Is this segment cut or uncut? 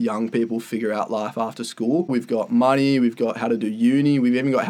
cut